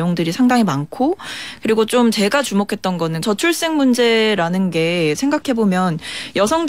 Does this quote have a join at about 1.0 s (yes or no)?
no